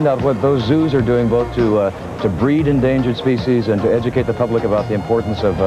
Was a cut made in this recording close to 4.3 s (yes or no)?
yes